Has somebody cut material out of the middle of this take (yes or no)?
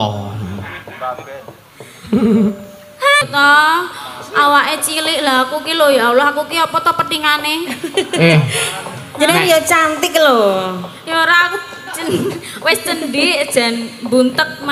yes